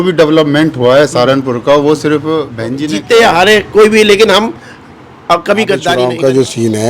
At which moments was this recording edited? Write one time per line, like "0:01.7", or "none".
0:02.8
0:06.0